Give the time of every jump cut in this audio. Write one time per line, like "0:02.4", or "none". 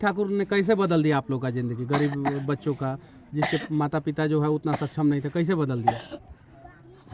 none